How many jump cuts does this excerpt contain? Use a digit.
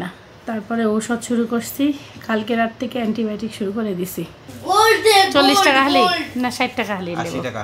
1